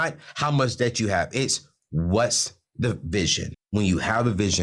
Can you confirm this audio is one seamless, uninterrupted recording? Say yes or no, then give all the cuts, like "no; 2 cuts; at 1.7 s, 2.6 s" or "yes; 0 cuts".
no; 1 cut; at 3.5 s